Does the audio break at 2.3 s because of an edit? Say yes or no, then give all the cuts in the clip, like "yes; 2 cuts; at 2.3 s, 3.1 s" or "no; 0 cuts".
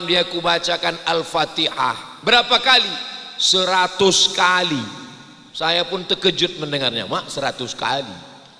no; 0 cuts